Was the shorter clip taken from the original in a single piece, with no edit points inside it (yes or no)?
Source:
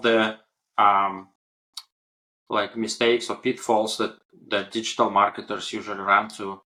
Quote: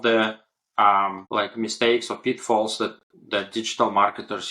no